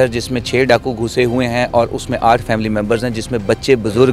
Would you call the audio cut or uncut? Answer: uncut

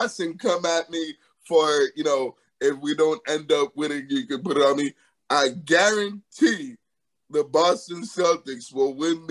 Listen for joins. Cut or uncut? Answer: uncut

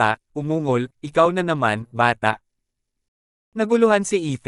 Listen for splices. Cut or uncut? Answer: uncut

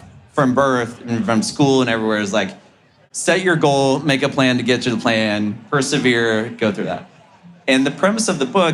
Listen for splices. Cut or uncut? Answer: uncut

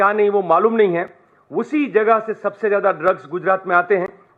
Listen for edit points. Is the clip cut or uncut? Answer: uncut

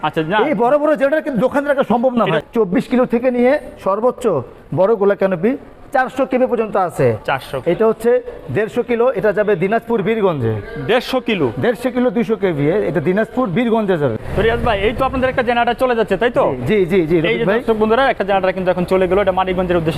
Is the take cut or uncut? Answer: cut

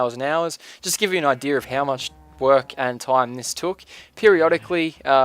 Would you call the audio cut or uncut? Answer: cut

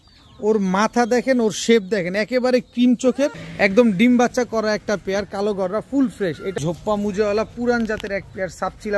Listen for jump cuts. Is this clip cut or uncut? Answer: cut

